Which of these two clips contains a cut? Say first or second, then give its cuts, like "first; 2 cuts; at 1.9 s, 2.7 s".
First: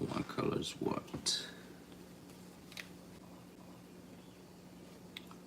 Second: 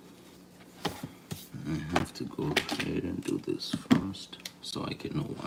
first; 1 cut; at 3.5 s